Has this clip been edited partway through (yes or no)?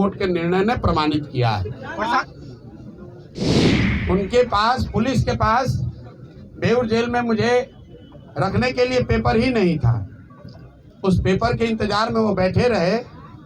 yes